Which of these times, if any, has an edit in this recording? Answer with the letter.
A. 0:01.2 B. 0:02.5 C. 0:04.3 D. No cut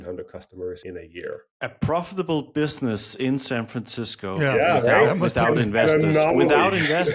A